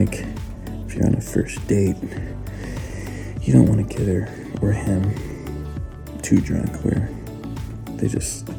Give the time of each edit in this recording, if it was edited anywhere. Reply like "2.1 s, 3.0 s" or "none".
none